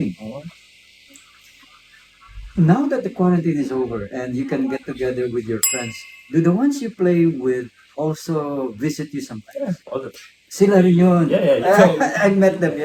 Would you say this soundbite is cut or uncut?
uncut